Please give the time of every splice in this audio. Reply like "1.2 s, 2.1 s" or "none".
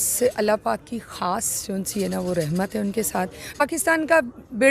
3.6 s